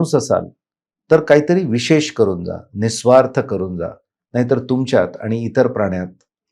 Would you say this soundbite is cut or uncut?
uncut